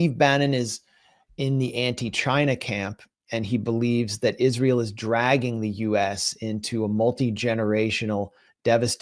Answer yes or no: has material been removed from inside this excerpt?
no